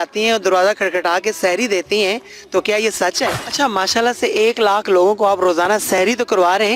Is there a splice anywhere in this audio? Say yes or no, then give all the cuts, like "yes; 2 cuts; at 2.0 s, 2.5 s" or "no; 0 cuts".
yes; 1 cut; at 3.0 s